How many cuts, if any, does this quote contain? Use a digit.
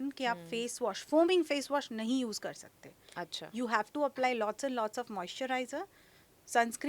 0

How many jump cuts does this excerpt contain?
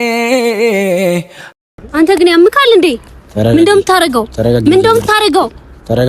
1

